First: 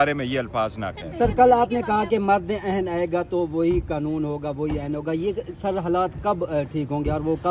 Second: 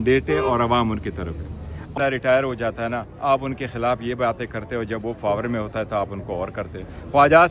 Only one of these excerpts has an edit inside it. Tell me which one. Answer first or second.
second